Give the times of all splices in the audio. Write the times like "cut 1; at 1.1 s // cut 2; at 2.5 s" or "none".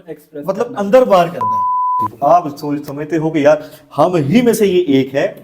cut 1; at 1.9 s